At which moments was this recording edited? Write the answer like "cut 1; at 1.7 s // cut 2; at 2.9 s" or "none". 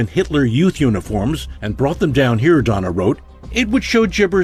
none